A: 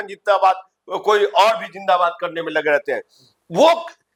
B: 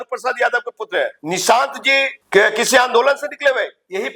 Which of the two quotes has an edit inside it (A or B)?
B